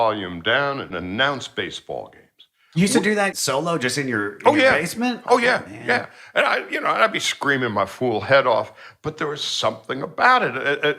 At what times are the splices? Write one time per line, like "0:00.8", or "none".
0:00.9
0:03.3